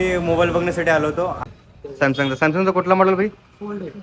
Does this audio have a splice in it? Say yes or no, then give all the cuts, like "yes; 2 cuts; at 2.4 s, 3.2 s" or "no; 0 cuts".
yes; 1 cut; at 1.4 s